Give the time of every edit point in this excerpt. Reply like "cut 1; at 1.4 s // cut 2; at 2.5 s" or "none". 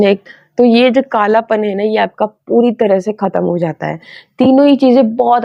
none